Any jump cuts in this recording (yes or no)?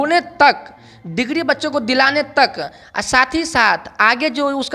no